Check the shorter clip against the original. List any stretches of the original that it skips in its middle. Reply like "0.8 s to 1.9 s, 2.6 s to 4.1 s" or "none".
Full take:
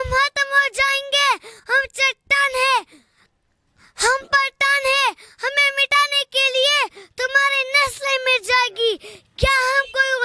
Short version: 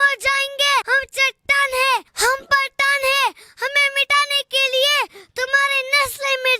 1.4 s to 1.7 s, 2.9 s to 3.9 s